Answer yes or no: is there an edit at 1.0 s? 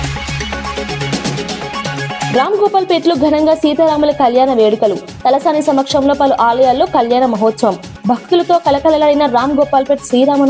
no